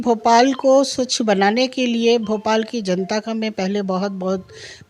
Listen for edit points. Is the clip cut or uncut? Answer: uncut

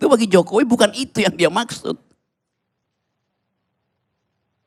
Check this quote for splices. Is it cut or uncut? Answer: uncut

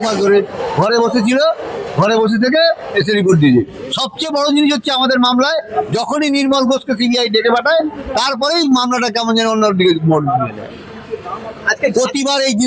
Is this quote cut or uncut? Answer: uncut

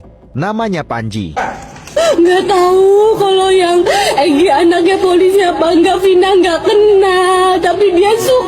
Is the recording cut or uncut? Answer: cut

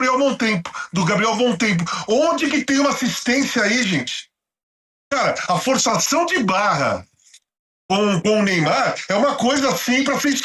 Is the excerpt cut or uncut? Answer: uncut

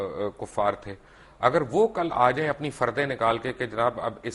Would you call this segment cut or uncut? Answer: uncut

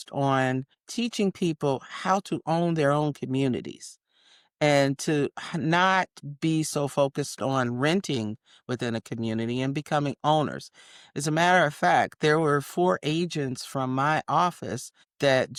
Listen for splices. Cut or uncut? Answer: uncut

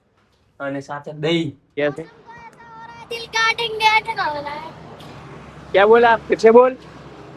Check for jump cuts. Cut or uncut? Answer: cut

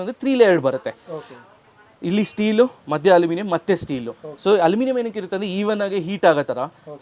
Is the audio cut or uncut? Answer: uncut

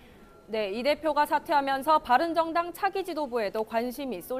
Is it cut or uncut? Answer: cut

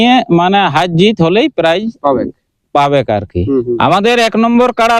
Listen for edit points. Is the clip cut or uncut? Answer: cut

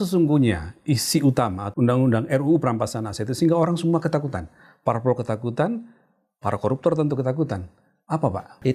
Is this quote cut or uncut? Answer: cut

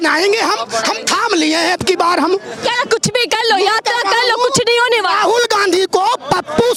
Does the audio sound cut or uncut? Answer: uncut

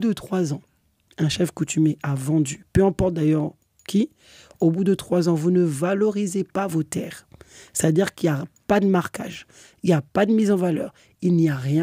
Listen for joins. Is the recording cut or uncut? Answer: uncut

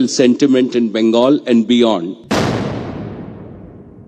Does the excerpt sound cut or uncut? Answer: cut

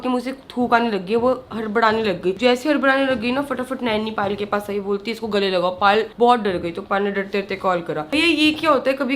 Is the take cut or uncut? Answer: uncut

